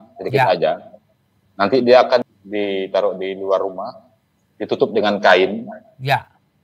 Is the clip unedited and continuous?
no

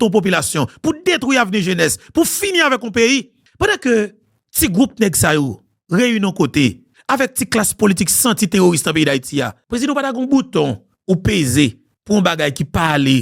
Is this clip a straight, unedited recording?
no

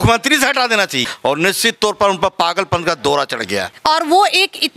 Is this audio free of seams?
no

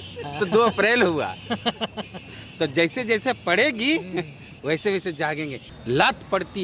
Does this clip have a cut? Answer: yes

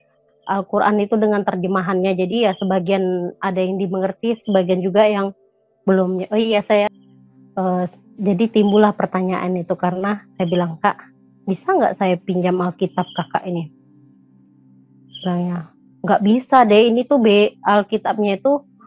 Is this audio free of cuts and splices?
no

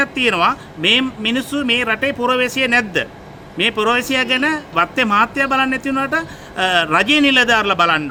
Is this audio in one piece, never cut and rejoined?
yes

